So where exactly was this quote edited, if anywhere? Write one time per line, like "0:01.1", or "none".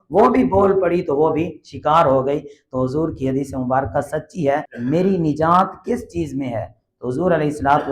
0:04.7